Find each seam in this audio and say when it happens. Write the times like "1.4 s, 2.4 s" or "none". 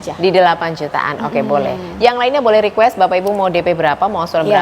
none